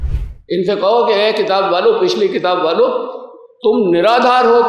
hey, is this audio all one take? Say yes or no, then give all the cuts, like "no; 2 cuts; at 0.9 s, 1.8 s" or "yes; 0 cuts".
yes; 0 cuts